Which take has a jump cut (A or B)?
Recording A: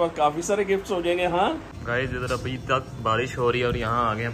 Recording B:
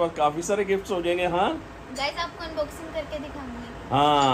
A